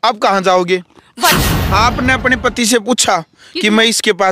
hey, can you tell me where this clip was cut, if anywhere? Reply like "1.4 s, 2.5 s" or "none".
1.3 s